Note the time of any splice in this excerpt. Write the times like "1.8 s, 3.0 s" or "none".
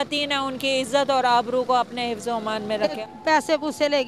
3.0 s